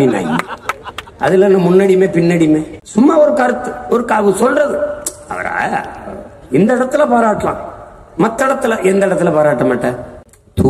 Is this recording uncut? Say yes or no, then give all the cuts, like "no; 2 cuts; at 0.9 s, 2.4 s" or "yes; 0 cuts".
yes; 0 cuts